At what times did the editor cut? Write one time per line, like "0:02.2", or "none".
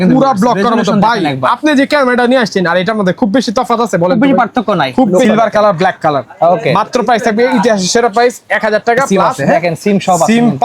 0:05.2
0:09.1